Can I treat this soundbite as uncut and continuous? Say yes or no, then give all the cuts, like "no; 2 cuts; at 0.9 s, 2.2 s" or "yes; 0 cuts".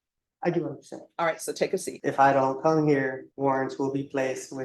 no; 2 cuts; at 1.9 s, 3.3 s